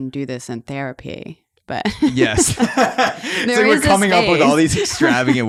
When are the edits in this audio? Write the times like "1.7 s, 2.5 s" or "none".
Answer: none